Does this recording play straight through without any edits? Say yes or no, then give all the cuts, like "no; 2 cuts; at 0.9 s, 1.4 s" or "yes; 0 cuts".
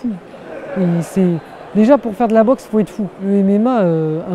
no; 1 cut; at 3.2 s